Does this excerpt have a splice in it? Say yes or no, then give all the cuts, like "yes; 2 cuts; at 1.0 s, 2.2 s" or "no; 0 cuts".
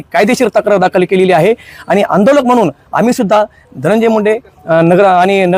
no; 0 cuts